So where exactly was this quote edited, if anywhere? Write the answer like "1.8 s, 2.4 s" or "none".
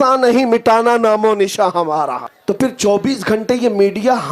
2.3 s